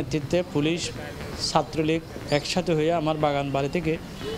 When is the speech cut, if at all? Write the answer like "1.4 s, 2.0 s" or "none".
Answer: none